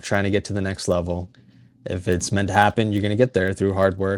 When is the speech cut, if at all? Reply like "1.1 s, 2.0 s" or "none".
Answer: none